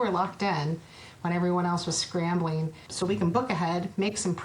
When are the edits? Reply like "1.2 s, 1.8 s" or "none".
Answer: 2.8 s